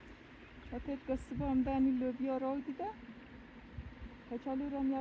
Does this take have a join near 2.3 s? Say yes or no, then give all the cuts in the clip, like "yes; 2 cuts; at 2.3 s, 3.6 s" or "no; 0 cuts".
no; 0 cuts